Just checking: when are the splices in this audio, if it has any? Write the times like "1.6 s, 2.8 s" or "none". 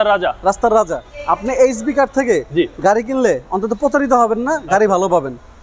1.1 s